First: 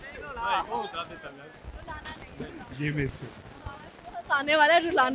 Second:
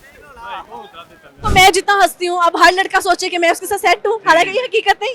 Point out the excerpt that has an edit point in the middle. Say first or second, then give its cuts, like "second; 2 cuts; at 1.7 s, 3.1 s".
second; 1 cut; at 1.4 s